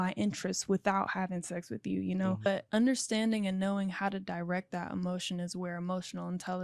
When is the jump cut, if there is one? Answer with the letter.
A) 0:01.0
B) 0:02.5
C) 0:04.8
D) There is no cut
B